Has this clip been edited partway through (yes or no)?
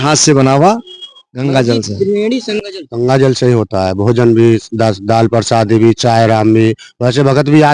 yes